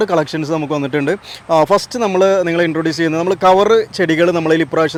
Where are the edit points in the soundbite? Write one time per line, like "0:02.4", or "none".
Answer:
none